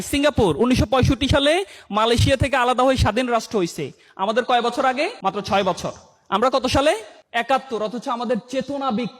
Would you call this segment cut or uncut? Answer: cut